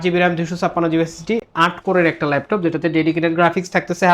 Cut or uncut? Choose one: uncut